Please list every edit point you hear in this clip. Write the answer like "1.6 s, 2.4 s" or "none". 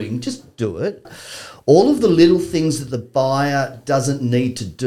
1.1 s